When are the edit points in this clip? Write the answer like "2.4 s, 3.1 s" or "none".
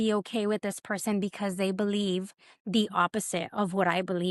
none

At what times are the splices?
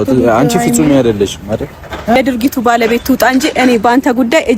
2.2 s

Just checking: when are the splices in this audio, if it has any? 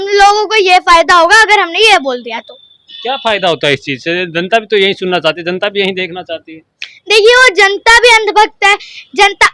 none

